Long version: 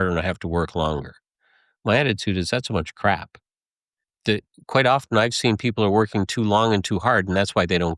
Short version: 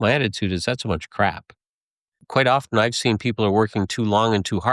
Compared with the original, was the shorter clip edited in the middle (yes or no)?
yes